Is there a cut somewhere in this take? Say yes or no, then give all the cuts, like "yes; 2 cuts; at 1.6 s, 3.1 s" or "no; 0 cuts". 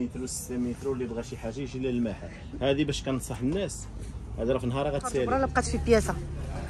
yes; 1 cut; at 5.3 s